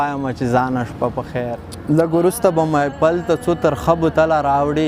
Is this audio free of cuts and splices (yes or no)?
no